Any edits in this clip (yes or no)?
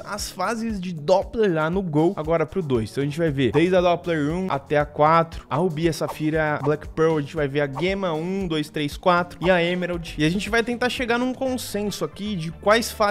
yes